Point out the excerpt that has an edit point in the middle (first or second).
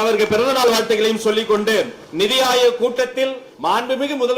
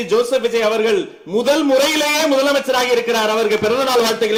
first